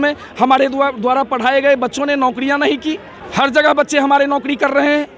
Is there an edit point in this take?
no; 0 cuts

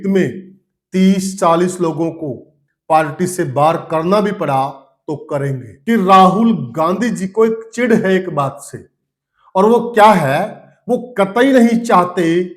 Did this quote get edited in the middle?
yes; 1 cut; at 5.7 s

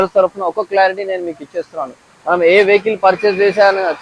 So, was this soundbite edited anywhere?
no; 0 cuts

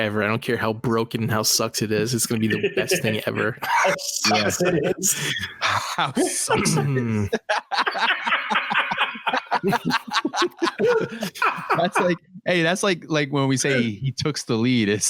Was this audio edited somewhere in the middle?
no; 0 cuts

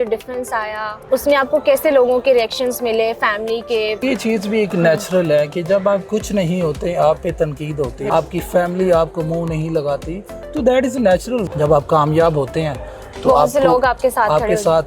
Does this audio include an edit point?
yes; 4 cuts; at 0.9 s, 4.0 s, 8.0 s, 11.5 s

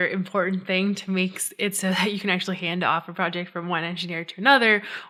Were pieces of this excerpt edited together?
no; 0 cuts

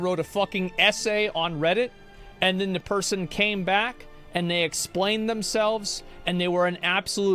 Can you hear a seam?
no; 0 cuts

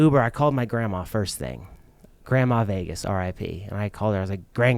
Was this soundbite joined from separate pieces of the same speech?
no; 0 cuts

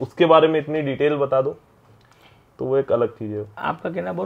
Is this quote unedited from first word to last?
yes; 0 cuts

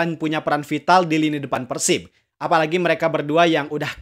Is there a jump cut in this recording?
no; 0 cuts

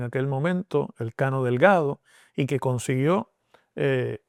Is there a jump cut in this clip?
no; 0 cuts

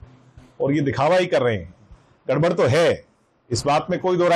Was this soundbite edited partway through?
no; 0 cuts

